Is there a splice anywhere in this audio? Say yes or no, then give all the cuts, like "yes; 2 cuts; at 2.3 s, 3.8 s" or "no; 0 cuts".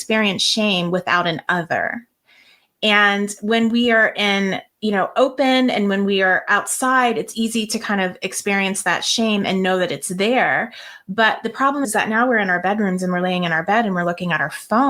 no; 0 cuts